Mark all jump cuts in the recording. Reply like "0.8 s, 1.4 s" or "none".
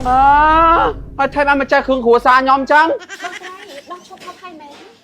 3.2 s